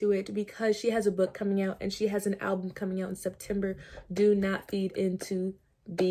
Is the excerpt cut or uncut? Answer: uncut